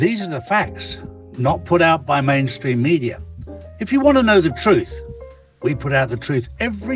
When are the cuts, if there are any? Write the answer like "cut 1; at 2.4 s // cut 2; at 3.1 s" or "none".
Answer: none